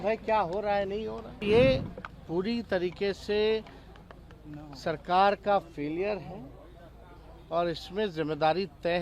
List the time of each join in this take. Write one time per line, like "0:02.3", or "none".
0:01.4